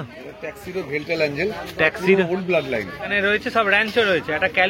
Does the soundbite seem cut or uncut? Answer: cut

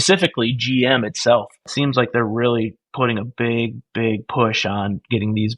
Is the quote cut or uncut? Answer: cut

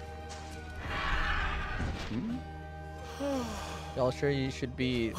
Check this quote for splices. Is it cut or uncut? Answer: uncut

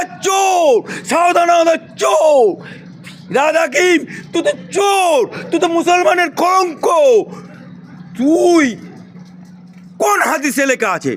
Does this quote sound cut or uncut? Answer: uncut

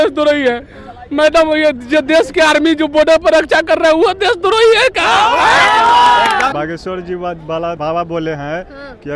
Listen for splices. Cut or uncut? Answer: cut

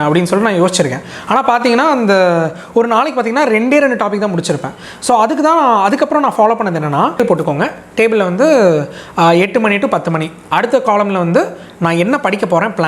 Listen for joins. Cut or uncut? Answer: cut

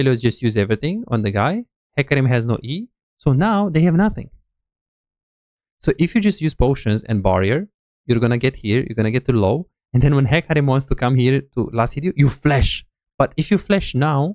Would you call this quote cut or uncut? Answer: uncut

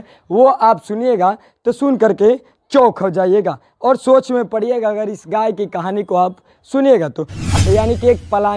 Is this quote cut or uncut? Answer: cut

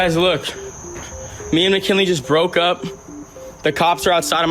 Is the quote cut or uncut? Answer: uncut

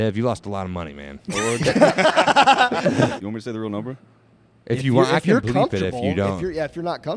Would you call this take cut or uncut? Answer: cut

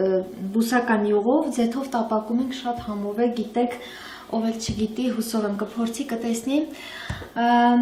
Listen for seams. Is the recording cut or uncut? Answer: cut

